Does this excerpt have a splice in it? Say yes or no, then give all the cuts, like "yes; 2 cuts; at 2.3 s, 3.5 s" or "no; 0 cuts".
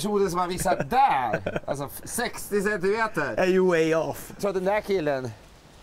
yes; 1 cut; at 4.4 s